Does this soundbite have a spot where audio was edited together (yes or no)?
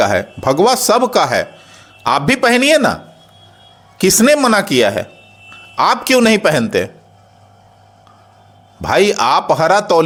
no